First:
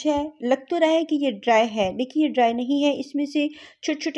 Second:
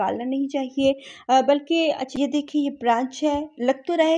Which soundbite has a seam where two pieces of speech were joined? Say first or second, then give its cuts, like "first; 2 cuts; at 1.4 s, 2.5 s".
second; 1 cut; at 2.2 s